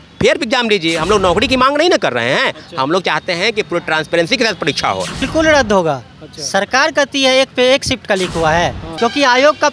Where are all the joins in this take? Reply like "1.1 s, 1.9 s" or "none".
5.3 s, 8.9 s

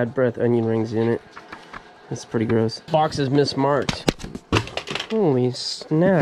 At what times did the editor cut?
2.8 s

